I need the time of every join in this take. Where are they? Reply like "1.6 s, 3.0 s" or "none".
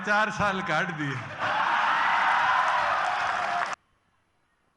3.7 s